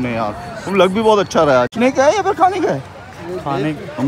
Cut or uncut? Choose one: cut